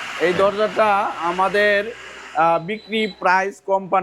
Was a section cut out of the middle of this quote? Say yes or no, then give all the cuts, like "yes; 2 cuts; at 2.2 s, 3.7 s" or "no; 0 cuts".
no; 0 cuts